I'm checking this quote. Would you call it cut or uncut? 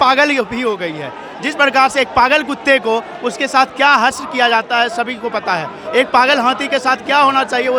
uncut